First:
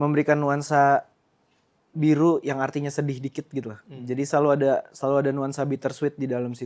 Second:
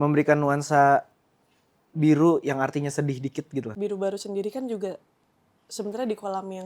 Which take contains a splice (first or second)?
second